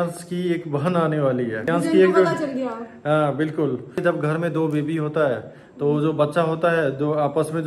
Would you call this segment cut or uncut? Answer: cut